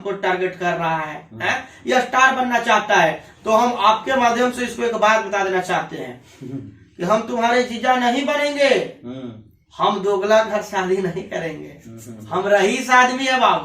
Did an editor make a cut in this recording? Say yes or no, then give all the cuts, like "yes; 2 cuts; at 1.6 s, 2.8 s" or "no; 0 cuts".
no; 0 cuts